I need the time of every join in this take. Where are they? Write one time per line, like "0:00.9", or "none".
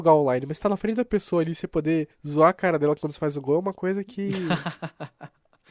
0:02.2
0:04.5